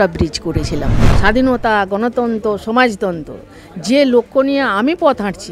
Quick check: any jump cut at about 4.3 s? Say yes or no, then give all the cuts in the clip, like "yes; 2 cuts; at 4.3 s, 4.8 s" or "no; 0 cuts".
no; 1 cut; at 1.1 s